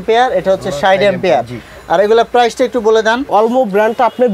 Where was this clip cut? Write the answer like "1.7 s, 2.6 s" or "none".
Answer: 3.3 s